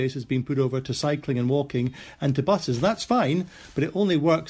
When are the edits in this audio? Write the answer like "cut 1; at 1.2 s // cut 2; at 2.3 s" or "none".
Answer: none